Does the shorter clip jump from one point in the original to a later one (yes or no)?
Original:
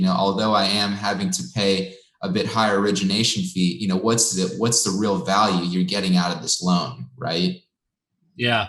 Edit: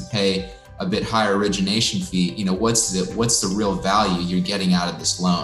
no